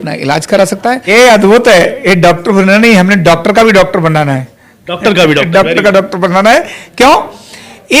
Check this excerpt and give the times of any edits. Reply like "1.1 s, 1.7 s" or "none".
1.0 s